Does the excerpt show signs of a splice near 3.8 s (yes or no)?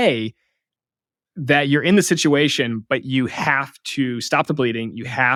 no